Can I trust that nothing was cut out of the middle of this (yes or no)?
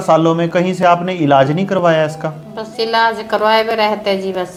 yes